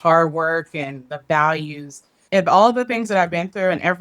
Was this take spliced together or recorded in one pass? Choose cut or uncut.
cut